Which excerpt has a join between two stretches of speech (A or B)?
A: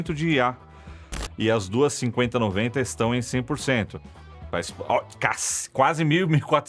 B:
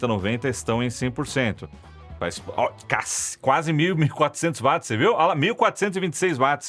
A